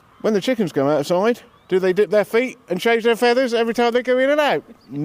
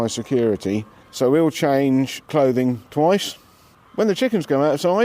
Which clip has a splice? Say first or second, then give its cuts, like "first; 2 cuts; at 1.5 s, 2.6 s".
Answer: second; 2 cuts; at 1.0 s, 2.2 s